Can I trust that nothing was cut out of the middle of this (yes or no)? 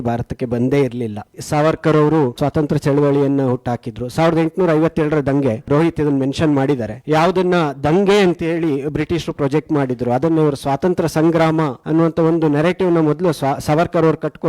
yes